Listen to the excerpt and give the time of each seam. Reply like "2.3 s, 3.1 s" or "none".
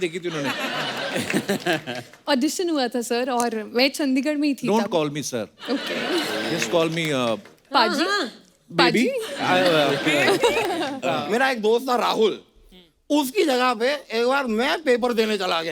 11.0 s